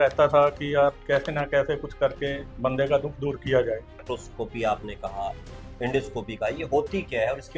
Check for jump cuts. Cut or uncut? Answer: cut